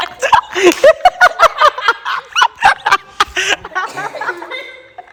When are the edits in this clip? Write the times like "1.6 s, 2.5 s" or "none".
none